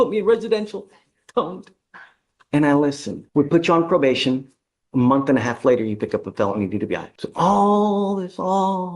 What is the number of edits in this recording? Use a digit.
2